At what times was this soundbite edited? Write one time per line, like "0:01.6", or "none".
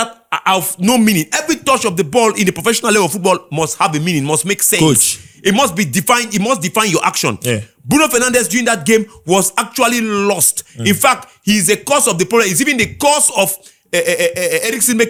none